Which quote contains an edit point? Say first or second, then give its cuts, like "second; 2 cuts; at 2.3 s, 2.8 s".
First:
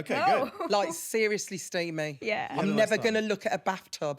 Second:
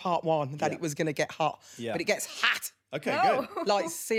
first; 1 cut; at 2.5 s